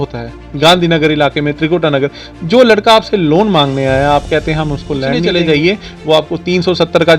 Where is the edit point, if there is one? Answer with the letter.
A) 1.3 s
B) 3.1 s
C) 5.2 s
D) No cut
C